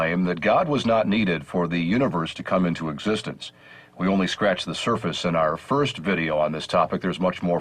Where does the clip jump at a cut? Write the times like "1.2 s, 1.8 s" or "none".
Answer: 1.1 s